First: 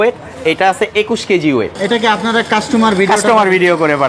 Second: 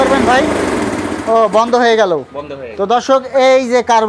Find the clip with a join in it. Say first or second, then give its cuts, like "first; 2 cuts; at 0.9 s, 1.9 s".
first; 1 cut; at 1.7 s